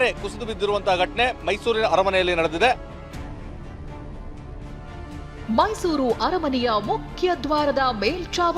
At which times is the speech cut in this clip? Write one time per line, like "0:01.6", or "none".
0:02.8
0:05.5